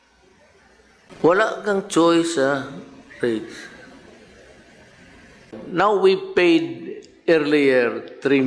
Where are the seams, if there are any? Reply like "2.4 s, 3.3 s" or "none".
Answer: 1.1 s, 5.6 s